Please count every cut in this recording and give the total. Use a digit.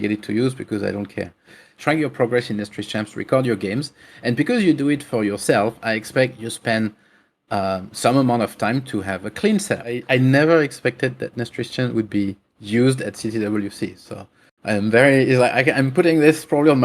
2